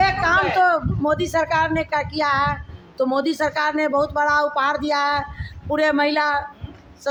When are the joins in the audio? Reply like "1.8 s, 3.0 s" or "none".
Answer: none